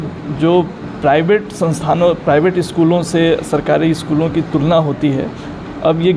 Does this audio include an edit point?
no; 0 cuts

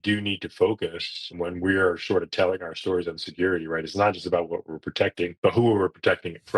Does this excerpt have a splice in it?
yes; 2 cuts; at 1.3 s, 5.3 s

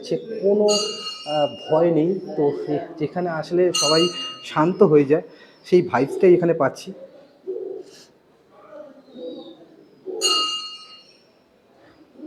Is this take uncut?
yes; 0 cuts

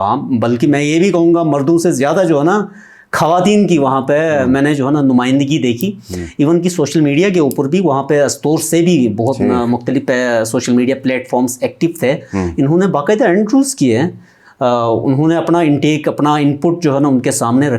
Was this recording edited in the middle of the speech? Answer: no; 0 cuts

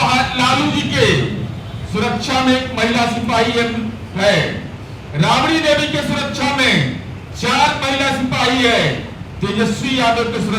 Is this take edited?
no; 0 cuts

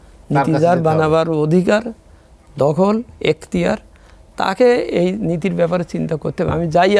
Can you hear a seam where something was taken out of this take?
no; 0 cuts

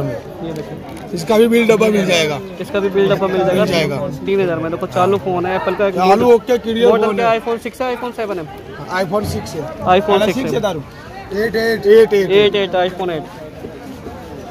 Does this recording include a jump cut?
no; 0 cuts

